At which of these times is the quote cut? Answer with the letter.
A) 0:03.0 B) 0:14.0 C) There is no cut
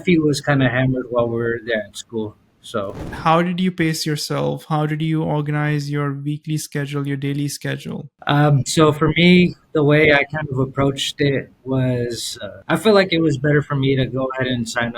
A